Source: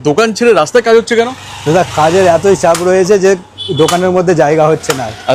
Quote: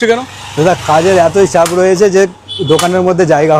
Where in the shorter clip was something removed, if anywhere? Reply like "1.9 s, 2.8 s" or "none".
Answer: none